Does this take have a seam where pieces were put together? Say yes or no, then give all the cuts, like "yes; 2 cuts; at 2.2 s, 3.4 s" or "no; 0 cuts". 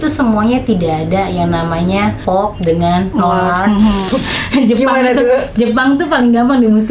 yes; 3 cuts; at 2.2 s, 3.1 s, 4.0 s